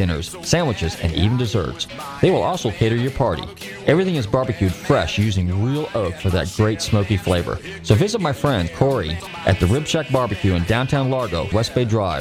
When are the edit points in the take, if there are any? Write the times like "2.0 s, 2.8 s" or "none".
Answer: 8.9 s, 11.5 s